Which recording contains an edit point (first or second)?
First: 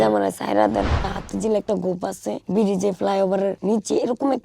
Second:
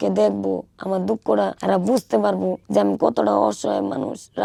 first